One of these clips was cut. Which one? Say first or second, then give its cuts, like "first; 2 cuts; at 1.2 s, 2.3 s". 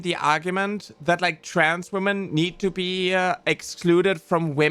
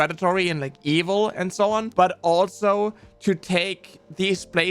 second; 1 cut; at 1.9 s